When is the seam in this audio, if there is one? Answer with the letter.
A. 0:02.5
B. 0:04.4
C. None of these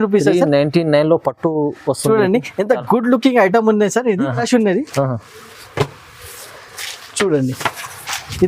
B